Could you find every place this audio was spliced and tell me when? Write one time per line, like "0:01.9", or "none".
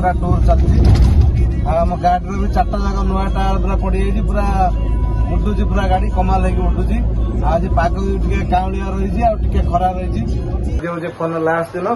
0:10.8